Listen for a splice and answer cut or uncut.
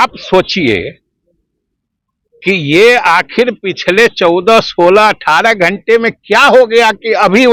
uncut